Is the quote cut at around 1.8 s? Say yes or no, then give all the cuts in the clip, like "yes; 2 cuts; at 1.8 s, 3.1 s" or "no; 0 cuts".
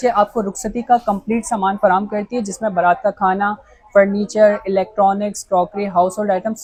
no; 0 cuts